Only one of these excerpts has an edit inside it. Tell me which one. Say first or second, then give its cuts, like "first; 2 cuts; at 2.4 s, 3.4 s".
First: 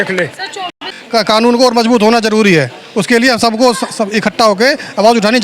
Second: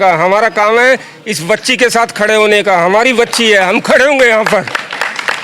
first; 1 cut; at 0.9 s